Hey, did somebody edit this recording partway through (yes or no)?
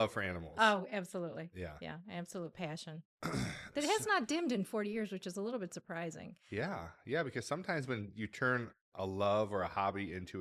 no